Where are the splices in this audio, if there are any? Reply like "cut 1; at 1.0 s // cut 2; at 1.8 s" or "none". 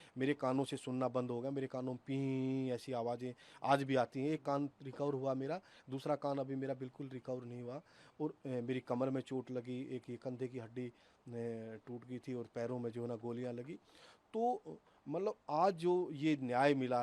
none